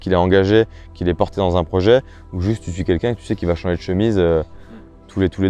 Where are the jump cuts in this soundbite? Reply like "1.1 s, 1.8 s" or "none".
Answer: none